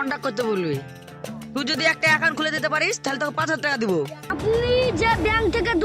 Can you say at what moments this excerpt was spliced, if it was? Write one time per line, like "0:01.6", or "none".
0:04.2